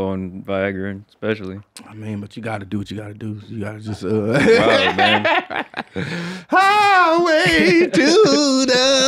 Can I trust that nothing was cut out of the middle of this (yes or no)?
yes